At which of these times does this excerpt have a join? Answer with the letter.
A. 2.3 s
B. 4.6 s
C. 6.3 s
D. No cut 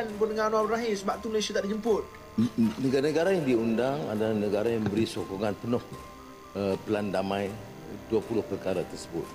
A